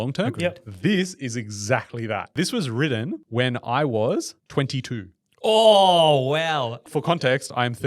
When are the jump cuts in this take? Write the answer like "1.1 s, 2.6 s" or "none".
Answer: 2.3 s, 3.2 s, 4.4 s, 6.8 s